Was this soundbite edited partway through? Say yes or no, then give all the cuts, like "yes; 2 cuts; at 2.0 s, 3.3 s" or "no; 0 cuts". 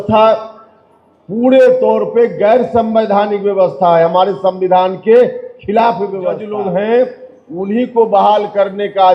yes; 1 cut; at 6.4 s